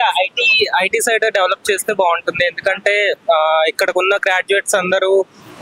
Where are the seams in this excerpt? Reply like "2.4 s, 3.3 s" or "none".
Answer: none